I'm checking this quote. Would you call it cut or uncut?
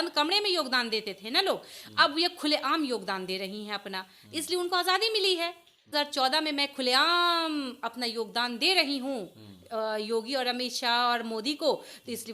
cut